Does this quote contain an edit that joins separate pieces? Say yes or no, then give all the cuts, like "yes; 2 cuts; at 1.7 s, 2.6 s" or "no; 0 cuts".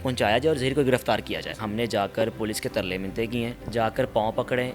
yes; 2 cuts; at 1.5 s, 3.6 s